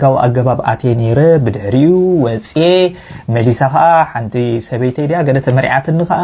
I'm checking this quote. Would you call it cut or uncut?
uncut